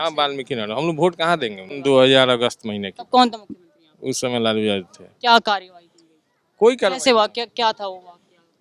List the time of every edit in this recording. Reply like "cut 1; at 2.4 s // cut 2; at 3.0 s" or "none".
cut 1; at 1.7 s